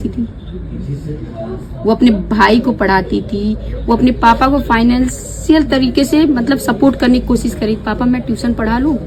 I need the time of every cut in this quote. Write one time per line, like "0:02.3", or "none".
none

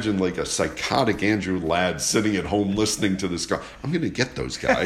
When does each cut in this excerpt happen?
none

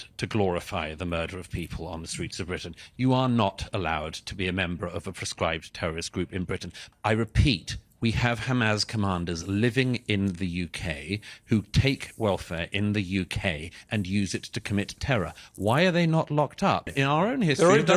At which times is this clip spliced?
0:06.8
0:16.9

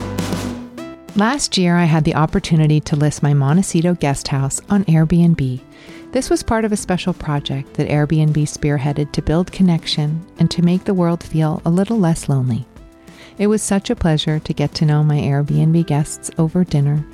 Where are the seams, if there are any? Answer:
0:01.0

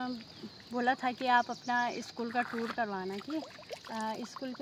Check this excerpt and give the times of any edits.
none

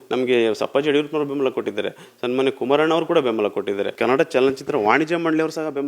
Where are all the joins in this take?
0:03.9

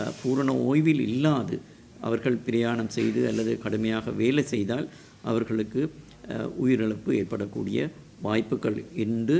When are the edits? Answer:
none

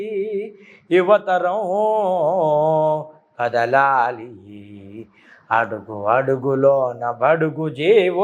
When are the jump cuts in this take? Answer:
none

